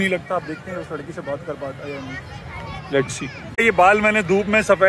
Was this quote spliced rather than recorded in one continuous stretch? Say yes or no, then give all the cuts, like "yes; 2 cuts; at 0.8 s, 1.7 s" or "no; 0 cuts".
no; 0 cuts